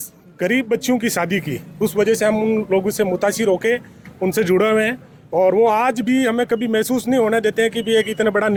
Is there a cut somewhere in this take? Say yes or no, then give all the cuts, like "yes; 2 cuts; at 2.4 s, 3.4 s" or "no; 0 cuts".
no; 0 cuts